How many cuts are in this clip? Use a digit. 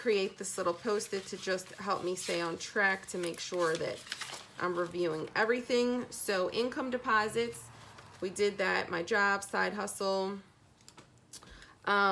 0